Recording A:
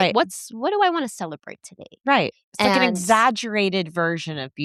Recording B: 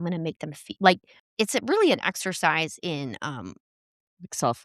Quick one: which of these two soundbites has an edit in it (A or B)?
B